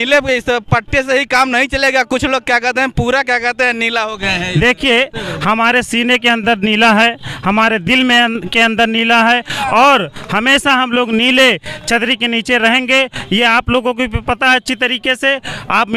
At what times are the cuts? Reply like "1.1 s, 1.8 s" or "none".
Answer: none